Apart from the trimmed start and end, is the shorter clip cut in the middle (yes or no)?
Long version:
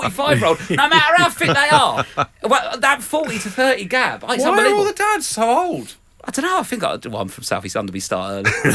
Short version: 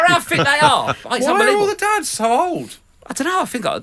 yes